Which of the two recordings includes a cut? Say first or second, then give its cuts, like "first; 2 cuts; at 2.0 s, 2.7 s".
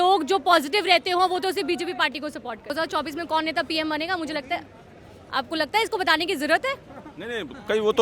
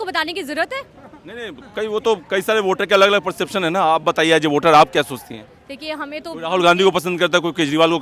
first; 1 cut; at 2.7 s